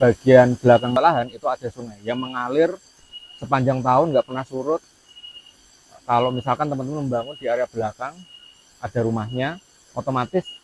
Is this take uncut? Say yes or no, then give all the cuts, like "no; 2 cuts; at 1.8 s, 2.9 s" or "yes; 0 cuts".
no; 1 cut; at 1.0 s